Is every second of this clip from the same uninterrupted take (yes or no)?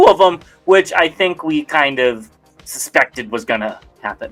yes